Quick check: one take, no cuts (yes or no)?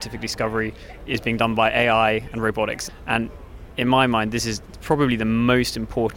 no